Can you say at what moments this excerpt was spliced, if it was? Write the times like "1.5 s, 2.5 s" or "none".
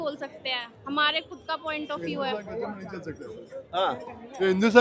none